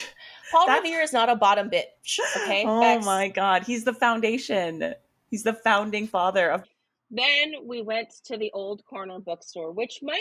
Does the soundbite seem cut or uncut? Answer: cut